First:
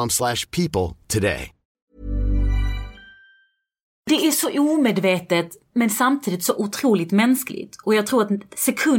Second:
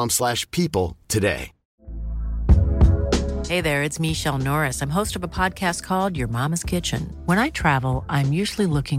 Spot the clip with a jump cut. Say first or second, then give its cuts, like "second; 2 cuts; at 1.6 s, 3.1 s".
first; 2 cuts; at 1.9 s, 4.1 s